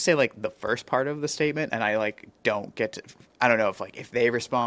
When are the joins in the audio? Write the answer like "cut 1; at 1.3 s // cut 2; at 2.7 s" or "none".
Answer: none